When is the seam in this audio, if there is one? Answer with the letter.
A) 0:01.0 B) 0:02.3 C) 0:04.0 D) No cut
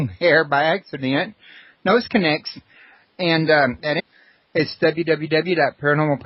D